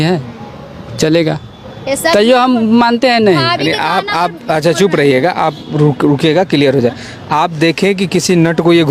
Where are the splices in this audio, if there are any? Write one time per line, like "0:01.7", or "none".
none